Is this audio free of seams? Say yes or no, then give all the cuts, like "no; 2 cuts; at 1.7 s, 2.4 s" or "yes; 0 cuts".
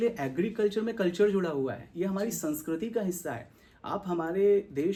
yes; 0 cuts